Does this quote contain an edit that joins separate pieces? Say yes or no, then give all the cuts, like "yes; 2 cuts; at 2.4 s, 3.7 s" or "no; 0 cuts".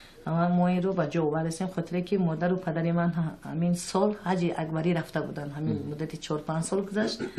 yes; 1 cut; at 2.4 s